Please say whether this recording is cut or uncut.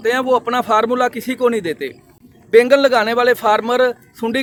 uncut